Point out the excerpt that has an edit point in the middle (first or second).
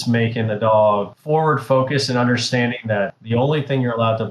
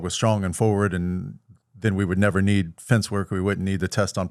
first